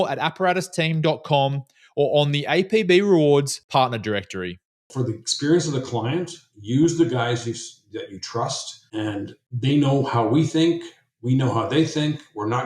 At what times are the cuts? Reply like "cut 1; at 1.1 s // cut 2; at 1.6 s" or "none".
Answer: cut 1; at 4.9 s